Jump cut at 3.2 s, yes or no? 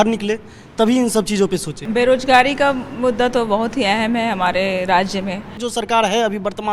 no